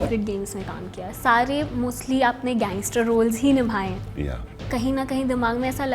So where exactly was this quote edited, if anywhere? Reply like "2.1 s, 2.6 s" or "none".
4.7 s